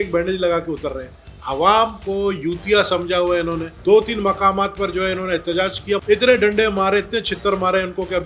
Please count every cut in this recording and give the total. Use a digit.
2